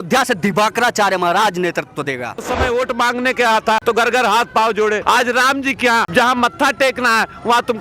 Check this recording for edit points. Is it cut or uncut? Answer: cut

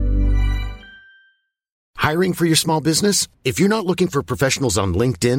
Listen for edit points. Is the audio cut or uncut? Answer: cut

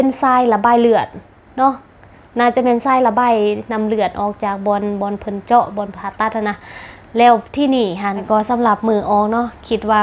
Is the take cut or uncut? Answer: cut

